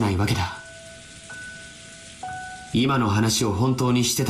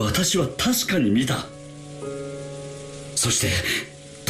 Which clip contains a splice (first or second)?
second